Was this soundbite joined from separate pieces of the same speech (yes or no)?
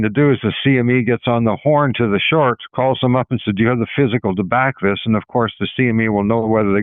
no